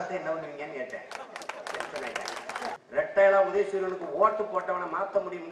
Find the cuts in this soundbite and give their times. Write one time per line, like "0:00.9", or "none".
0:02.8